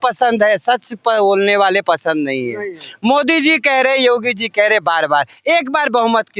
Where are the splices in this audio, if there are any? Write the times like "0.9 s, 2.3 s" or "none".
none